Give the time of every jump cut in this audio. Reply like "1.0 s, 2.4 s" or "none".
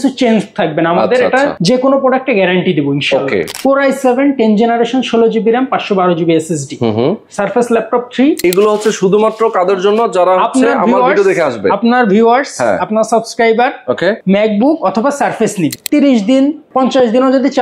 1.6 s, 3.5 s, 8.4 s, 14.2 s, 15.8 s, 16.6 s